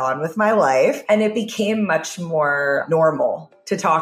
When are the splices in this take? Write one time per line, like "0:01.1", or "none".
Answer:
0:01.0
0:02.8